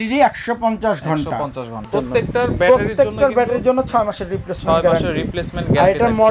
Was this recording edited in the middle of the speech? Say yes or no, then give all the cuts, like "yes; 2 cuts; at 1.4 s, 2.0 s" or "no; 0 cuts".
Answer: yes; 1 cut; at 1.8 s